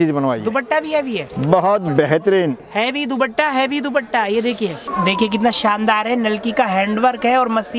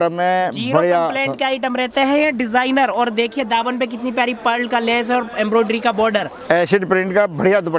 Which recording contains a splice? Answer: first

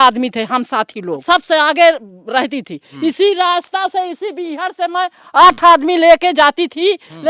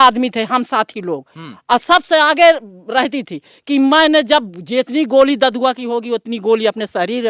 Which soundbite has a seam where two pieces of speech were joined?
first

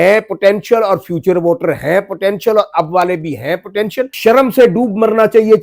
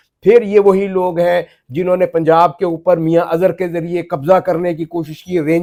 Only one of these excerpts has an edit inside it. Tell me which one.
first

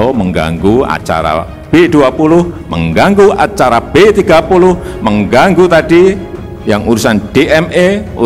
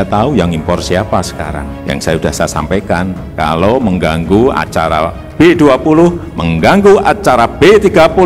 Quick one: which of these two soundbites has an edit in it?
second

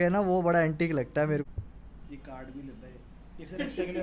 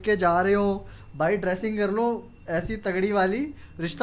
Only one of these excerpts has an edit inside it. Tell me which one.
first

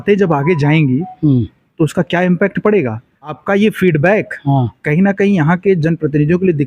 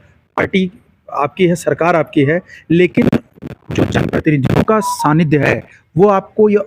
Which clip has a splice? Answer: first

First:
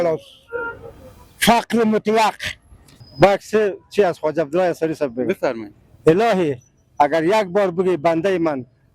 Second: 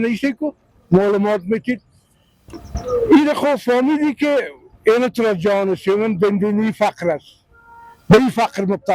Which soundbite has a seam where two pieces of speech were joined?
first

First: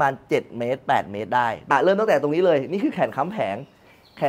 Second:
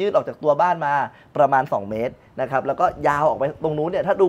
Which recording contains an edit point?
first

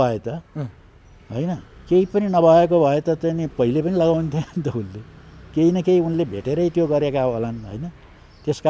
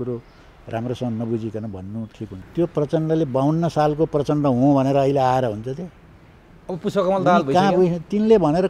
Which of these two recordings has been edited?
second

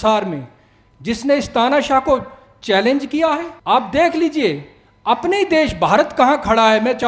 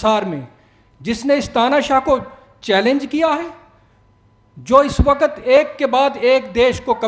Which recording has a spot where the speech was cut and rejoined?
first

